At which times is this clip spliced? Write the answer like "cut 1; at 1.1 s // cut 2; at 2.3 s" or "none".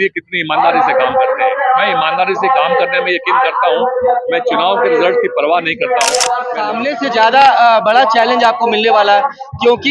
cut 1; at 6.6 s